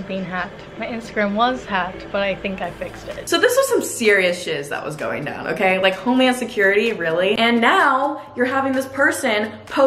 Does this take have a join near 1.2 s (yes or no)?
no